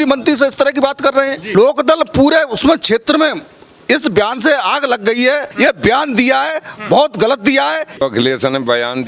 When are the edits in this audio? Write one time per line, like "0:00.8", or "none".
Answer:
0:01.5
0:05.5
0:08.0